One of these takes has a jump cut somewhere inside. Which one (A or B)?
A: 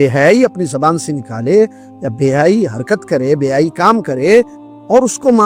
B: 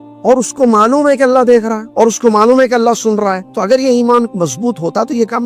B